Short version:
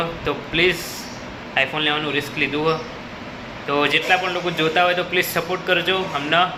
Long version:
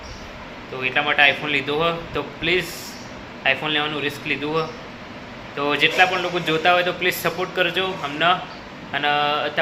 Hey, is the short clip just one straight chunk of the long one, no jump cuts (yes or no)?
yes